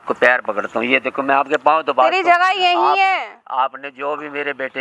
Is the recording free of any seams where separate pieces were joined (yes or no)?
yes